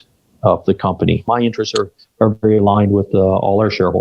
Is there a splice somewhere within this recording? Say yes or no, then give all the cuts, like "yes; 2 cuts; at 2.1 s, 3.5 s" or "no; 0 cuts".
yes; 1 cut; at 1.3 s